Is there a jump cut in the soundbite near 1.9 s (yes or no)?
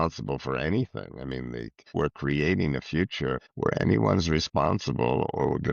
yes